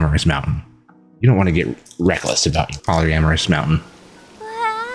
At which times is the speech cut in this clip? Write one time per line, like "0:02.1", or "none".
0:02.7